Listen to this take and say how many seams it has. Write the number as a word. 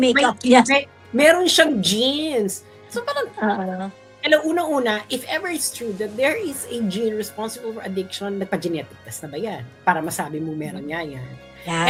zero